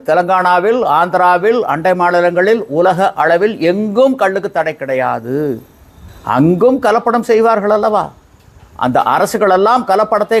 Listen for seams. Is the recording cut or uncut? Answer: uncut